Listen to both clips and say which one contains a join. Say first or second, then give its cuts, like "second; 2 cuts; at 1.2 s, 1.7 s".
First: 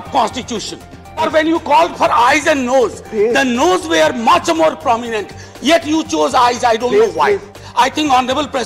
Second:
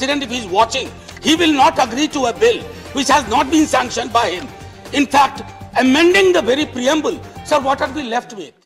first; 2 cuts; at 1.2 s, 7.6 s